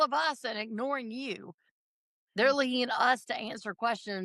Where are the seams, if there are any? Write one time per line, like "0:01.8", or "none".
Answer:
none